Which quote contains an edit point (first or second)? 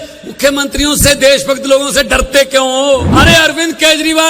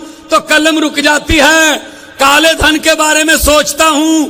first